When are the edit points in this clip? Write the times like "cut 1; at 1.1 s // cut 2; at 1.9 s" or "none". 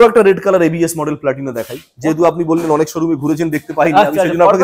none

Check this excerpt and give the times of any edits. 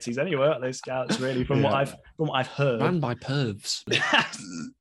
cut 1; at 3.8 s

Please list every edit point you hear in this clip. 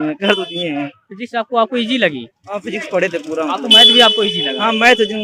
none

